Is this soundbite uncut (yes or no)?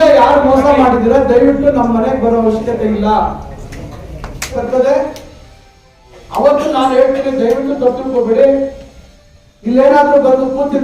no